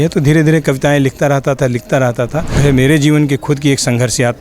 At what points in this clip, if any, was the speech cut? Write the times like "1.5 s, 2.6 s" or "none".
2.6 s